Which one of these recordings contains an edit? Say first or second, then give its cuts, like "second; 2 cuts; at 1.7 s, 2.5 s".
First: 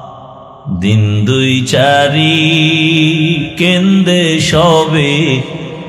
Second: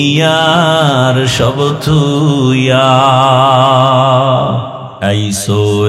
second; 1 cut; at 4.8 s